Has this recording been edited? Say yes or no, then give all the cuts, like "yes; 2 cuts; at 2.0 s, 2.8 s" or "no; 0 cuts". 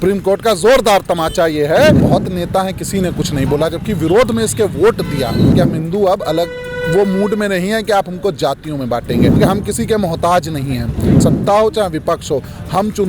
yes; 4 cuts; at 2.0 s, 5.5 s, 9.4 s, 11.2 s